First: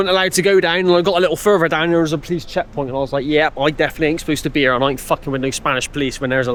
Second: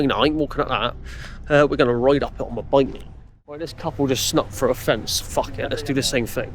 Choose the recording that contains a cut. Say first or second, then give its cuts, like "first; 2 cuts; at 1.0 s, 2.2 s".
second; 1 cut; at 3.7 s